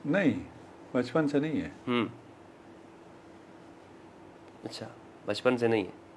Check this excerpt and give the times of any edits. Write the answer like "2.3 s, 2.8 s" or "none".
none